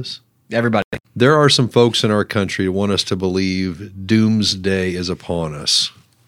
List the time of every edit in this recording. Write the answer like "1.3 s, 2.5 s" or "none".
0.9 s